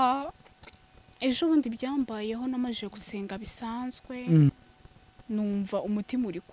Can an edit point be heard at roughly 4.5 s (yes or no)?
yes